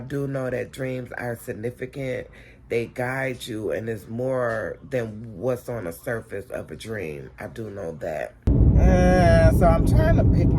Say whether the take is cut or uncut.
cut